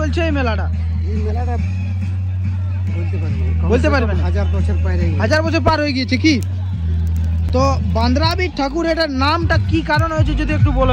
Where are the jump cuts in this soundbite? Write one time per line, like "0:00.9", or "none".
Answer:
none